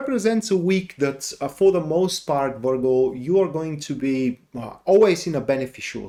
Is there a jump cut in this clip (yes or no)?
no